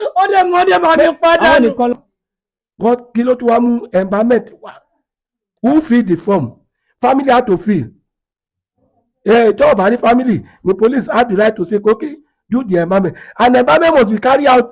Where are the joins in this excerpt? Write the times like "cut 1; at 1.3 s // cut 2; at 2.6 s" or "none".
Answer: cut 1; at 1.9 s

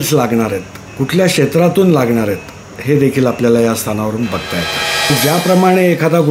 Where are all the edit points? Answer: cut 1; at 5.1 s

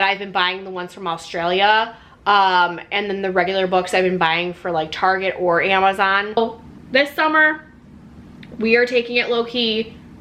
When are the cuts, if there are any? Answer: cut 1; at 6.4 s

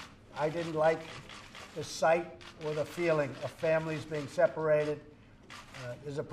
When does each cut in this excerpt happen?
none

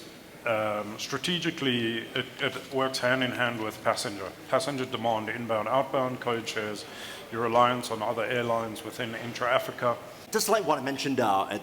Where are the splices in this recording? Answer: cut 1; at 10.1 s

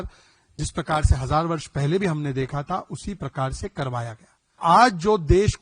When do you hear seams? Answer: cut 1; at 4.6 s

